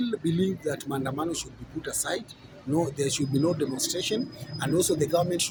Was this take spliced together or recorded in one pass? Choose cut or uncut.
uncut